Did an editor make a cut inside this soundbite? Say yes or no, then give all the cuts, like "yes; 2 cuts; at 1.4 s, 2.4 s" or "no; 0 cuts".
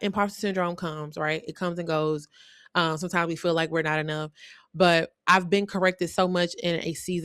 no; 0 cuts